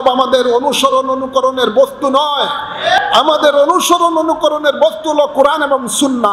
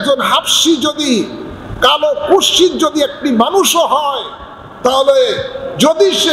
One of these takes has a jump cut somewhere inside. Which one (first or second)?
first